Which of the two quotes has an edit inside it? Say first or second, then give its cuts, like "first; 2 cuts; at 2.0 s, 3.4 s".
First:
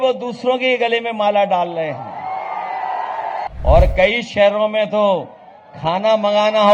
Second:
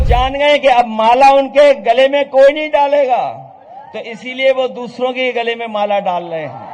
first; 1 cut; at 3.5 s